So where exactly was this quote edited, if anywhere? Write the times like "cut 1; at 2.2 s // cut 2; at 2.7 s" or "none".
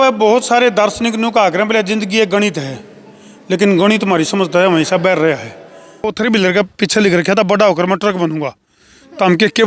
cut 1; at 6.1 s